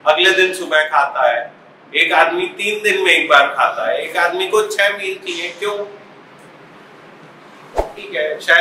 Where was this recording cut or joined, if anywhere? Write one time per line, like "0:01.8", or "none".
none